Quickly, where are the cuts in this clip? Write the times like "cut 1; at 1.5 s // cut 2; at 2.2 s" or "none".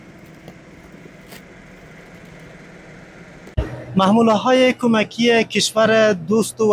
cut 1; at 3.5 s